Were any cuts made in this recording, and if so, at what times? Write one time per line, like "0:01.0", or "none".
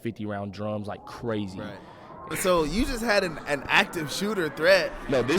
0:02.3